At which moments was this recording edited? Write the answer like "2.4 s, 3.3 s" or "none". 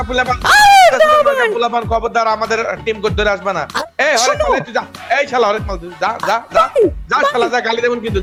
none